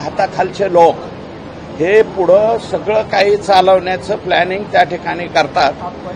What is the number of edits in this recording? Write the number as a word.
zero